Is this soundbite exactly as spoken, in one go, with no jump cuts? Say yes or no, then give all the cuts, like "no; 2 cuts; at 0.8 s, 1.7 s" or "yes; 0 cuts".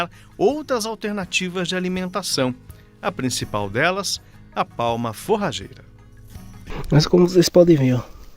no; 1 cut; at 6.7 s